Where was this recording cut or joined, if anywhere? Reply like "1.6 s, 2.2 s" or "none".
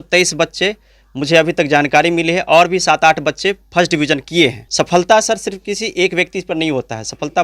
4.6 s